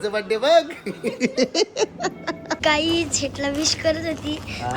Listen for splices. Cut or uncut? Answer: cut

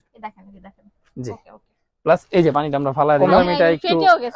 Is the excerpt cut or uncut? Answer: cut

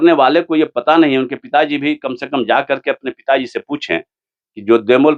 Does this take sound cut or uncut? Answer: uncut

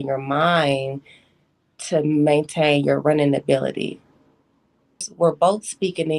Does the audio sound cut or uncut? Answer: cut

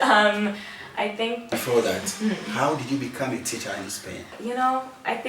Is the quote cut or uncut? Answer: cut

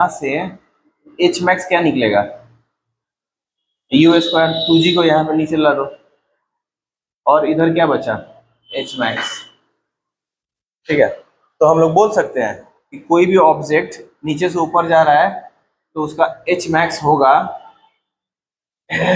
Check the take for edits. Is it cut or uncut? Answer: uncut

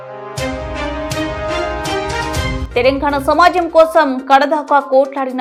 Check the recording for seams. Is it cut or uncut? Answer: uncut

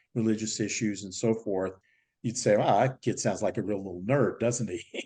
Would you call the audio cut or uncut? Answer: uncut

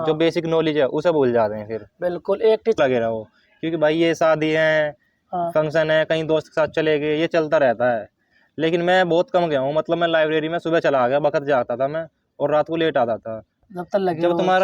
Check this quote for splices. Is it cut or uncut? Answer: cut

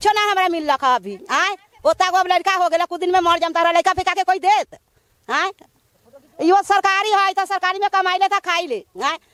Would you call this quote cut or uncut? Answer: uncut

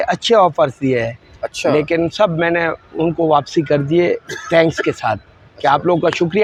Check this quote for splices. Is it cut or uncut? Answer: uncut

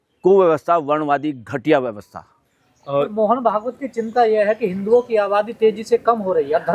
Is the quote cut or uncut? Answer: uncut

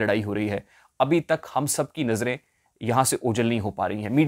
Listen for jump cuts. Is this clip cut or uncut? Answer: uncut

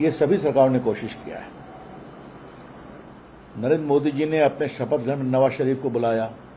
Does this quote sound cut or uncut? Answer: uncut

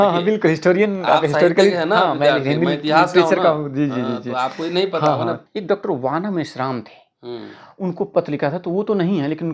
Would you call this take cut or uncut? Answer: cut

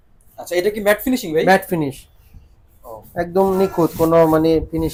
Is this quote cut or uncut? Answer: uncut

